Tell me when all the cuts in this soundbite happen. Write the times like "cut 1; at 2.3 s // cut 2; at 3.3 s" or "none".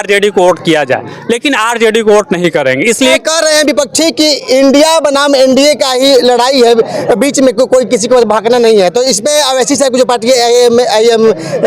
cut 1; at 3.2 s